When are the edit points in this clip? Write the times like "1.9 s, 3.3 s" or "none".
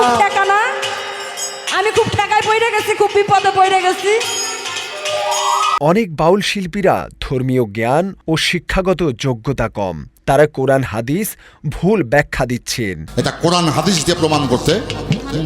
none